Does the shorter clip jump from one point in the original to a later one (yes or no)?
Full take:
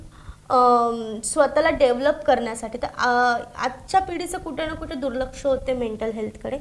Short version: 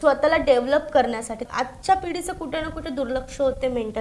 yes